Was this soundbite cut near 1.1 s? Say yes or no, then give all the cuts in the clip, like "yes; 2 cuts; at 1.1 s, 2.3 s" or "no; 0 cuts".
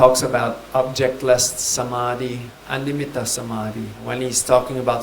no; 2 cuts; at 2.6 s, 4.0 s